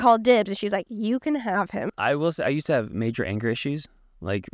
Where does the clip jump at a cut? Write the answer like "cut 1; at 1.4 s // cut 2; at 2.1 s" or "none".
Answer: cut 1; at 1.8 s